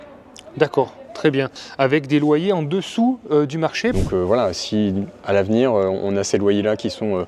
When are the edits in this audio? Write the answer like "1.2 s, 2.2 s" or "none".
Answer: 1.6 s, 3.9 s